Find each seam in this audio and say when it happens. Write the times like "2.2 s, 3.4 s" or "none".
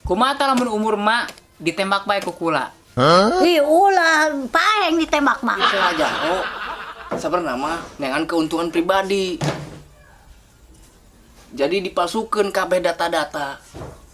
5.7 s